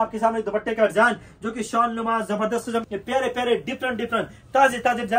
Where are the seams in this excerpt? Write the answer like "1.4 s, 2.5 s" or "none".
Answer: 2.8 s